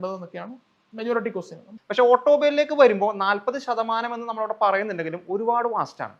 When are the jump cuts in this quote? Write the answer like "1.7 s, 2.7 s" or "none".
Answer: 1.6 s

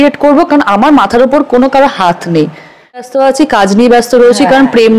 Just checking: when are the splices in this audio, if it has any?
3.0 s

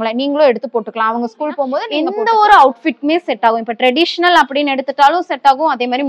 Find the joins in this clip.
1.9 s

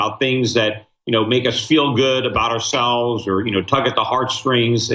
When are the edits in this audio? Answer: 1.2 s

